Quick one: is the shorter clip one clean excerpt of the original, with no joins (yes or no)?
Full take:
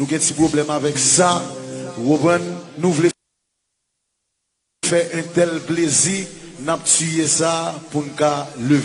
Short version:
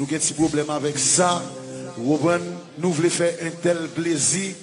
no